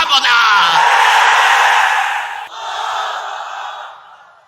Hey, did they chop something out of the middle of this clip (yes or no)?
yes